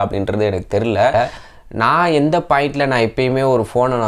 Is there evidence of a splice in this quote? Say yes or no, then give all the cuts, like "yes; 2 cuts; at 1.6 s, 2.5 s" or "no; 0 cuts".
yes; 1 cut; at 1.1 s